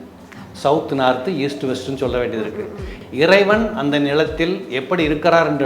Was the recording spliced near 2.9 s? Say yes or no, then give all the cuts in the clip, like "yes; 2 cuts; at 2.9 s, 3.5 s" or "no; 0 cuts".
yes; 1 cut; at 2.9 s